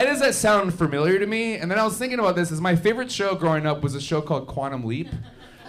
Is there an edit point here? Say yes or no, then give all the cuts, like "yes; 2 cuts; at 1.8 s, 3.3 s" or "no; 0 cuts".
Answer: no; 0 cuts